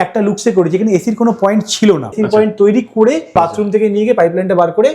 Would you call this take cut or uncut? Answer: cut